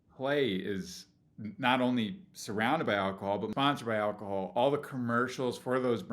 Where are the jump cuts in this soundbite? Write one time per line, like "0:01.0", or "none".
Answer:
0:03.5